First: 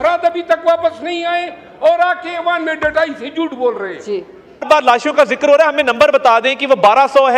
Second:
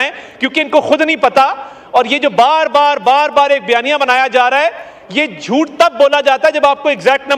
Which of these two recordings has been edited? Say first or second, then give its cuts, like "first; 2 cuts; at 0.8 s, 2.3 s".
first; 1 cut; at 4.6 s